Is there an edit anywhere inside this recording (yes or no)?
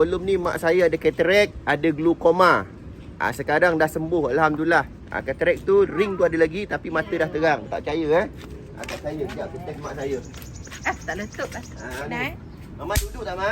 yes